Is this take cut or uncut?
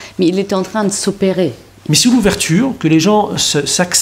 cut